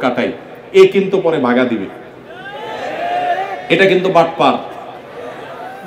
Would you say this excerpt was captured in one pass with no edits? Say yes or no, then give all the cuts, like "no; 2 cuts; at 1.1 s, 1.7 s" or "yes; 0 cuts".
yes; 0 cuts